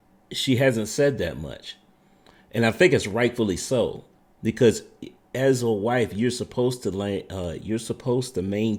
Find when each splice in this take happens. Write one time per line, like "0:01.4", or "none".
none